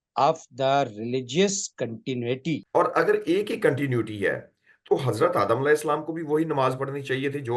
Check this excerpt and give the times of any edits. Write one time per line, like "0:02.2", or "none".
0:02.6